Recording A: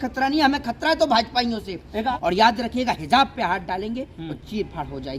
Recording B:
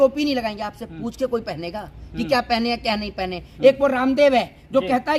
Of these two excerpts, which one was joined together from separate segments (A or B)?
A